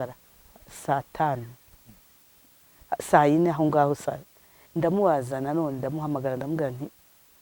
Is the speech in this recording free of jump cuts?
yes; 0 cuts

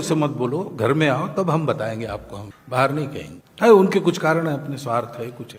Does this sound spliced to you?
no; 0 cuts

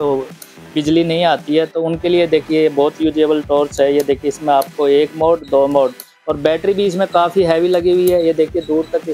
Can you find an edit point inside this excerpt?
no; 0 cuts

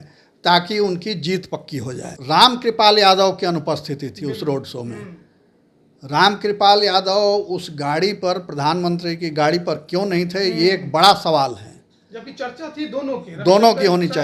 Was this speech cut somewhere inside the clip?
yes; 1 cut; at 2.1 s

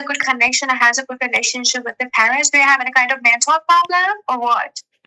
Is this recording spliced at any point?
no; 0 cuts

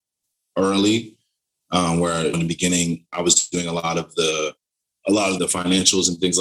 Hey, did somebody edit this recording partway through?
yes; 1 cut; at 5.4 s

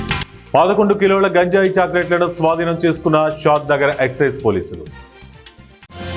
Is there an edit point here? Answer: no; 0 cuts

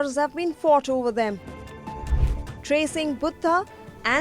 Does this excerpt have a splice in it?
no; 0 cuts

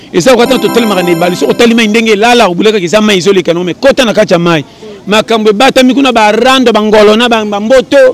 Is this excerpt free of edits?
yes; 0 cuts

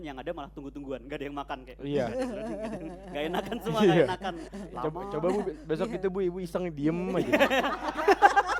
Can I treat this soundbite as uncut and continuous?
yes; 0 cuts

